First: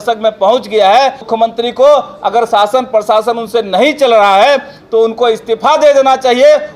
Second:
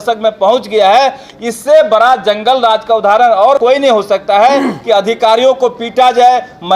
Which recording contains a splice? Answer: first; 1 cut; at 1.3 s

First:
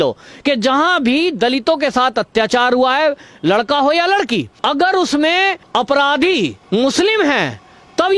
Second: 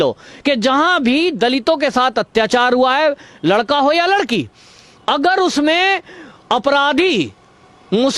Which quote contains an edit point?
first; 3 cuts; at 4.5 s, 5.6 s, 6.6 s

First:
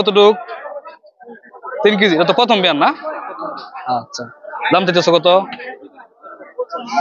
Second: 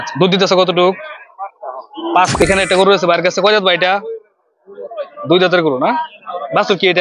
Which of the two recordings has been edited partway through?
second; 1 cut; at 2.4 s

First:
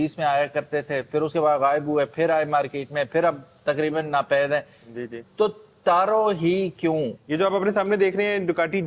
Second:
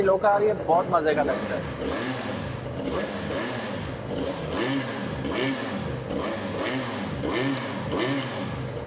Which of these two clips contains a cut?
first; 1 cut; at 7.2 s

